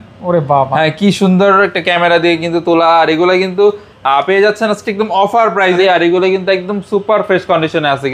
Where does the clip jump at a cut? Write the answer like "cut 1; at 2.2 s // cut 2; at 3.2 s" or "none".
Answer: cut 1; at 5.8 s